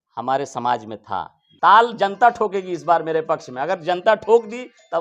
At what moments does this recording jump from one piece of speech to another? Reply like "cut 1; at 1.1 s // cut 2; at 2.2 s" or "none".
cut 1; at 1.4 s